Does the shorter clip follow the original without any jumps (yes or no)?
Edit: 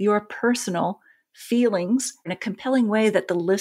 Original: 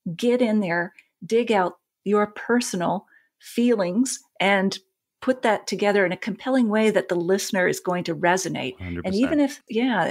no